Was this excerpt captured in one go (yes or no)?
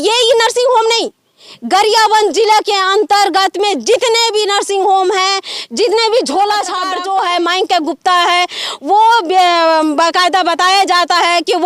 no